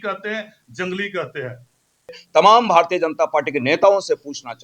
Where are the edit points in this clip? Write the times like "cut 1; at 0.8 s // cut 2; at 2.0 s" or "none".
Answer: cut 1; at 2.2 s